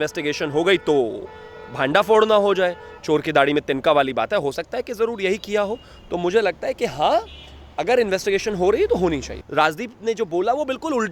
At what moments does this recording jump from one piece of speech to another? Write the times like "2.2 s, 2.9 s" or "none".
9.3 s

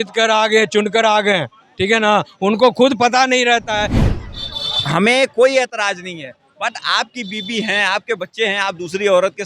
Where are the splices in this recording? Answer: 4.0 s

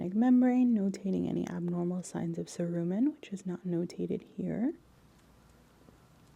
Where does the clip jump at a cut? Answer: 4.9 s

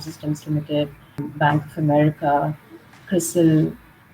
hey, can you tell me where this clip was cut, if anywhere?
1.3 s

